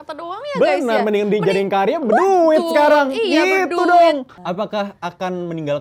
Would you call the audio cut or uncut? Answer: cut